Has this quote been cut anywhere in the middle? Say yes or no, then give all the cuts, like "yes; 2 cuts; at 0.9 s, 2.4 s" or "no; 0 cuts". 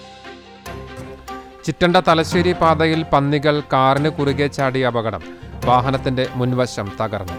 no; 0 cuts